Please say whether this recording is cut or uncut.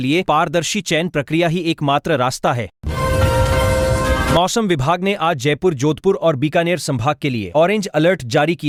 uncut